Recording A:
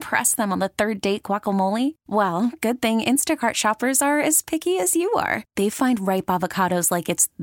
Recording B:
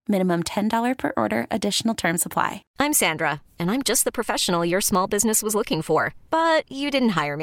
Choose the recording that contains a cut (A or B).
B